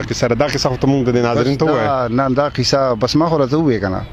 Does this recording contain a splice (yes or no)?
no